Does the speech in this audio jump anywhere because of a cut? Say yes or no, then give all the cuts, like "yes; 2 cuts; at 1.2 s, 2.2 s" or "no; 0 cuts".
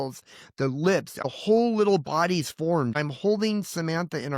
yes; 2 cuts; at 1.2 s, 2.9 s